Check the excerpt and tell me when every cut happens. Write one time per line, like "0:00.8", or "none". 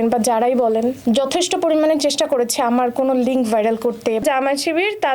0:01.0
0:04.2